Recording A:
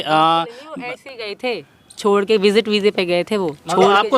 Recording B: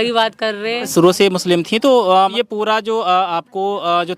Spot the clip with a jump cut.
B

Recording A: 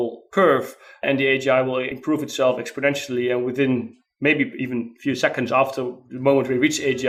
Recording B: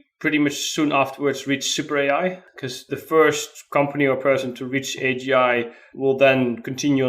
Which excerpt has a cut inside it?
B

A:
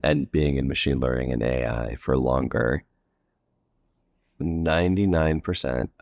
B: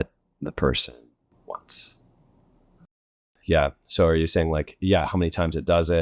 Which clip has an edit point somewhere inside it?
B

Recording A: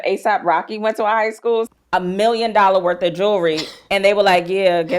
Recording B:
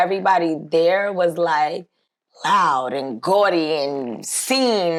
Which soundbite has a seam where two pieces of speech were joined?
A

